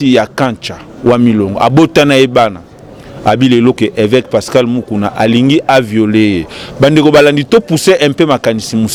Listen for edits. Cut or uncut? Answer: uncut